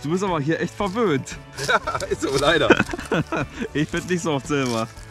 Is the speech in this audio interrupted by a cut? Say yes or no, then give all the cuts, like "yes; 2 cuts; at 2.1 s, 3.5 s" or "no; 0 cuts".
no; 0 cuts